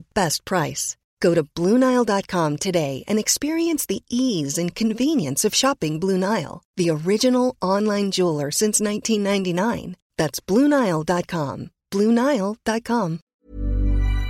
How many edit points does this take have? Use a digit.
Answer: 1